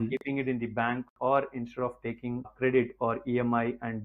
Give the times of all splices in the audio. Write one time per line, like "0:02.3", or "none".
0:02.5